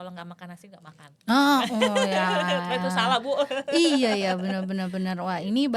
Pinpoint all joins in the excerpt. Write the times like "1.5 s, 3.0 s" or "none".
none